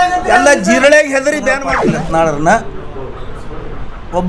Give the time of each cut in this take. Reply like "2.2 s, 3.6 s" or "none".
1.7 s